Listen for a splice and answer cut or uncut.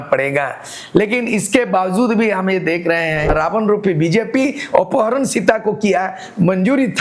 cut